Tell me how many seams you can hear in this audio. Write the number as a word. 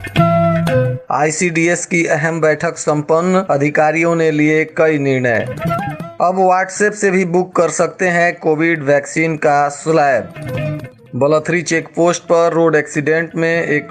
one